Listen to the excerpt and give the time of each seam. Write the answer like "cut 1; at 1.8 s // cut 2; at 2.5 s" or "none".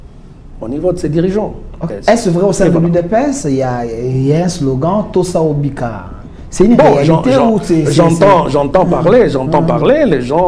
cut 1; at 1.9 s